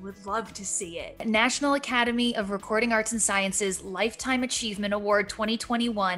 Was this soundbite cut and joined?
yes; 1 cut; at 1.2 s

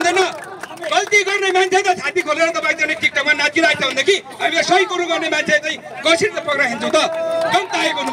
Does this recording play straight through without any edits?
yes; 0 cuts

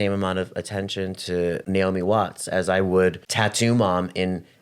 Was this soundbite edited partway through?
yes; 2 cuts; at 1.6 s, 3.3 s

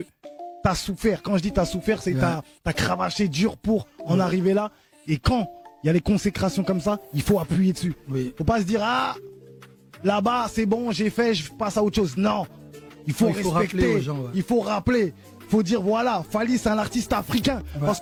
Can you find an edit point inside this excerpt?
no; 0 cuts

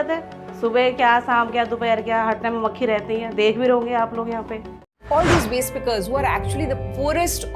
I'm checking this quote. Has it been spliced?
yes; 1 cut; at 4.9 s

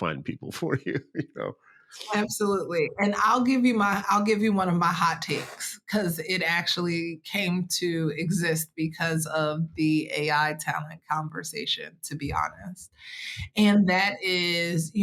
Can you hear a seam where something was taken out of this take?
no; 0 cuts

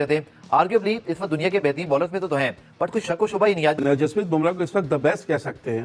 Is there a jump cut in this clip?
yes; 1 cut; at 3.8 s

